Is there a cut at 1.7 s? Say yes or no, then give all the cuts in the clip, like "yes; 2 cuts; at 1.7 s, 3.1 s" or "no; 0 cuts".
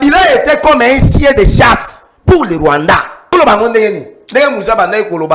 no; 1 cut; at 3.3 s